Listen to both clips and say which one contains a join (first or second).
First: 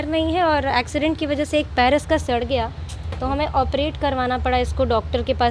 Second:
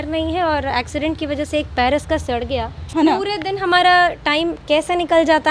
second